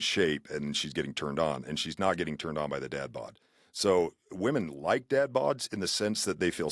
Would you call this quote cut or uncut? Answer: uncut